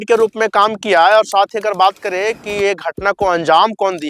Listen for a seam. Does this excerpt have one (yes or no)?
no